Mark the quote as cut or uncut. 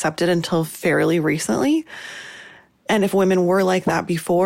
uncut